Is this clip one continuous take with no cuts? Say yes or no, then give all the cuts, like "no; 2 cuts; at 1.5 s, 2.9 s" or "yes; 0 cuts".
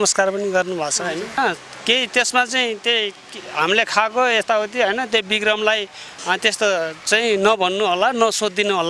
no; 1 cut; at 1.4 s